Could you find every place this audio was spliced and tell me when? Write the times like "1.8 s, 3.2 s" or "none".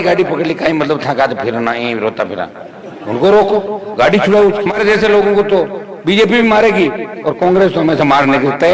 4.8 s